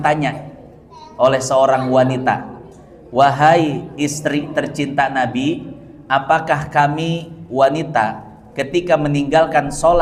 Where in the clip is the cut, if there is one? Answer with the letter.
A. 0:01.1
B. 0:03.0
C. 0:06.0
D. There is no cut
D